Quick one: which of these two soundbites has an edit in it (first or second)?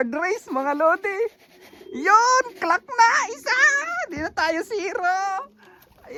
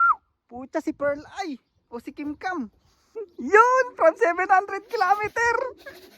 second